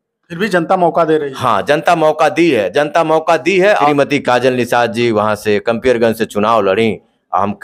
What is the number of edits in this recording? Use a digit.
1